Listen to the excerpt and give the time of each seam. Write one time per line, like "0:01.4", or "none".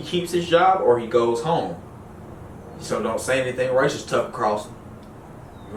none